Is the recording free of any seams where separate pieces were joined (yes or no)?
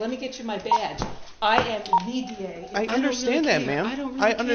no